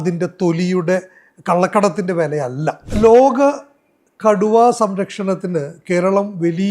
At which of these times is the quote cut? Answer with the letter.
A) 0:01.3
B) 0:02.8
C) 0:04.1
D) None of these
B